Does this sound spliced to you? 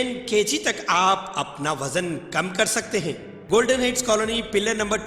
yes; 1 cut; at 3.3 s

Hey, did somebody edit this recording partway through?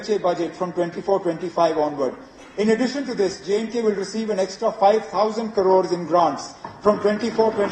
no; 0 cuts

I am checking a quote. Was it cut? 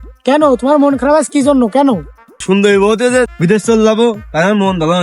yes; 2 cuts; at 2.4 s, 3.3 s

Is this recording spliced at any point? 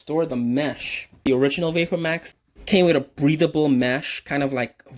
yes; 2 cuts; at 1.3 s, 2.2 s

